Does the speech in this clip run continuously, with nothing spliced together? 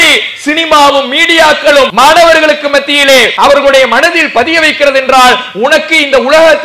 no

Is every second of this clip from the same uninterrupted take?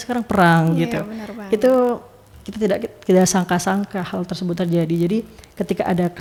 yes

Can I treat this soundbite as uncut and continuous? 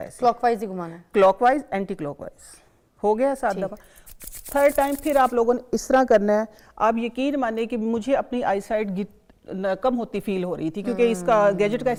yes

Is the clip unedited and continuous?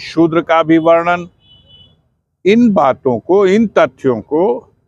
yes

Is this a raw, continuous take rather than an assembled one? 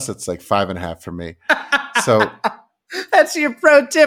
yes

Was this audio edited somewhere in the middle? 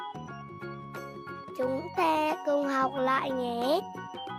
no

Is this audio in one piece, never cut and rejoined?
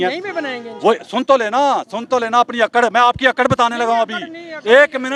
yes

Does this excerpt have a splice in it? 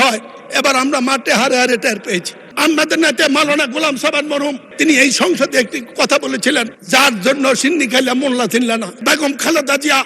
yes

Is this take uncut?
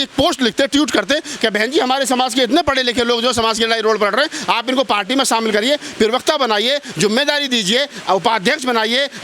yes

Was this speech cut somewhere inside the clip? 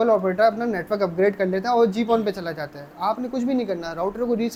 no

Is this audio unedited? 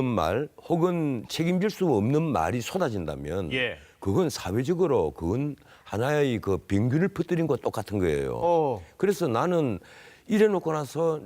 no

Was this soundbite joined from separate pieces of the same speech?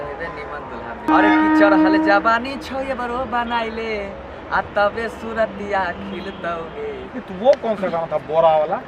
yes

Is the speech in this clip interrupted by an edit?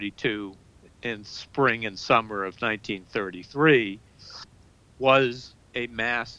no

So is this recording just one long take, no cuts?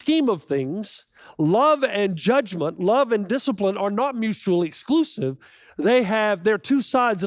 yes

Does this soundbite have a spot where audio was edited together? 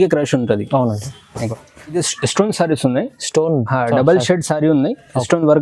yes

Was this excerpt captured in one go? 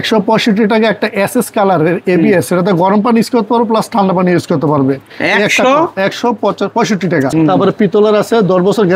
no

